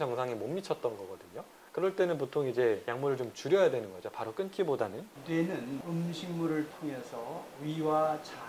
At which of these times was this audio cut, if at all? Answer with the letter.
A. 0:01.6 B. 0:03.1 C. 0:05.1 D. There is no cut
C